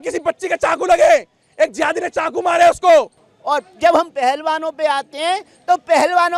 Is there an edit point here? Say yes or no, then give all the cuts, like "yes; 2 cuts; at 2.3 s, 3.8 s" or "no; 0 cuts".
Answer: yes; 1 cut; at 3.1 s